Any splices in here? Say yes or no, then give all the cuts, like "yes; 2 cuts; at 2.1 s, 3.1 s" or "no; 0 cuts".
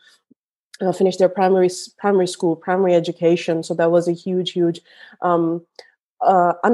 no; 0 cuts